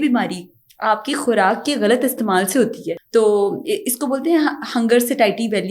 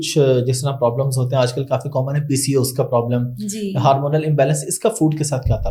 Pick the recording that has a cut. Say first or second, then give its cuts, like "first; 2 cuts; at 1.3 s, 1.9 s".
first; 1 cut; at 2.9 s